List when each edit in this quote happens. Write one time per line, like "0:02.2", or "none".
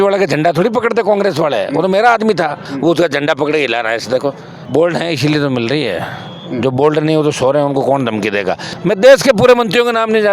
0:02.6
0:04.6
0:08.7